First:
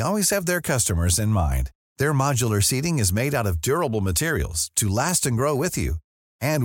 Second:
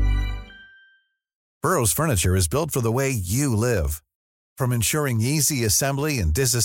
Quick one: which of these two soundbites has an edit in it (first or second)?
second